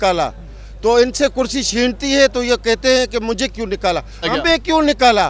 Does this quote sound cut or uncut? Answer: cut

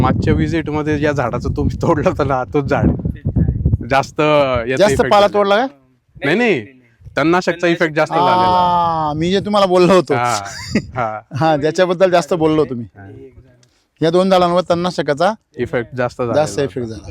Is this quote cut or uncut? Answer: uncut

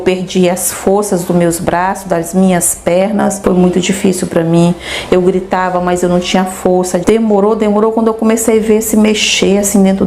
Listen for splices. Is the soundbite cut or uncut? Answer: cut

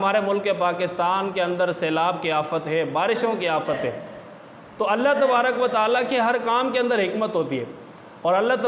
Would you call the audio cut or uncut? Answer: uncut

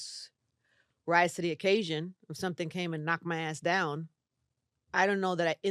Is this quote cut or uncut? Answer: uncut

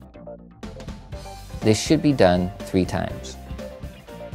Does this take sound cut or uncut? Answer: cut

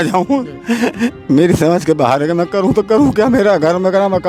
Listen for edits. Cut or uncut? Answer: uncut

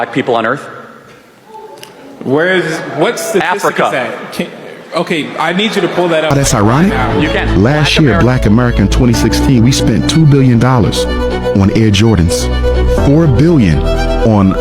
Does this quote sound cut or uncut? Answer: cut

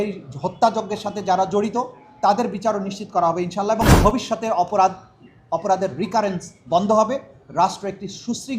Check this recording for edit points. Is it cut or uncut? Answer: cut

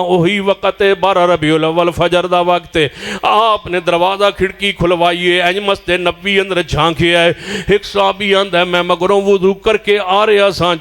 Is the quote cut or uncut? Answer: uncut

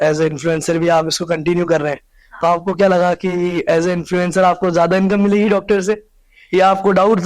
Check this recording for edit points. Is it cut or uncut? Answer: uncut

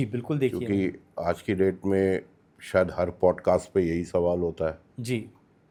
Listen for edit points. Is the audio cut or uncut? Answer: uncut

